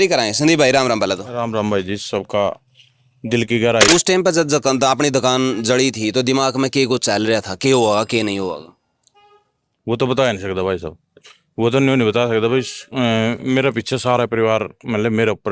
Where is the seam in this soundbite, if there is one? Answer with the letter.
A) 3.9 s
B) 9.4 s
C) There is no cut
A